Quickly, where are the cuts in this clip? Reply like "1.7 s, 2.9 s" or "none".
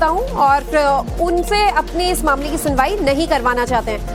none